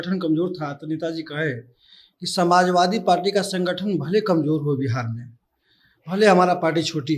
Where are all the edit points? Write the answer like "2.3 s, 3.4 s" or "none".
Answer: none

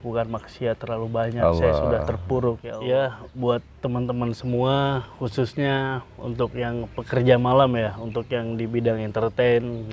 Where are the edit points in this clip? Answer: 2.7 s

